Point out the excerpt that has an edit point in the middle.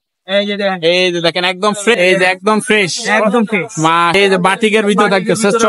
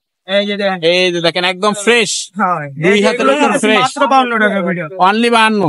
first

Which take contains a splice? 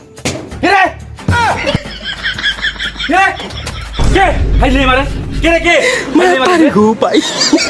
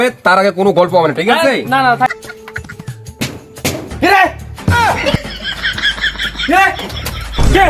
second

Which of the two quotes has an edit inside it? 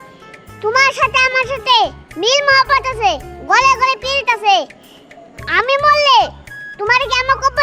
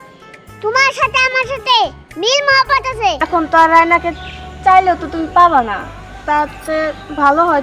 second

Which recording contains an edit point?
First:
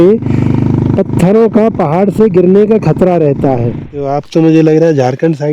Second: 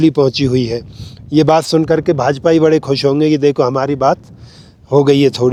first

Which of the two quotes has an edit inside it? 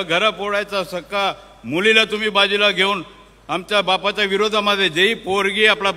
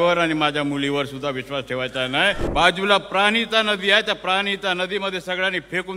second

